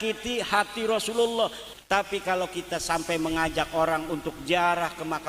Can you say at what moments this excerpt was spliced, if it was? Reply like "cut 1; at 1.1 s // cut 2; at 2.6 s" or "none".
cut 1; at 1.7 s